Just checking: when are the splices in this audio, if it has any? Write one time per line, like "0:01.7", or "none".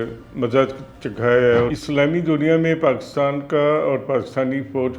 0:01.7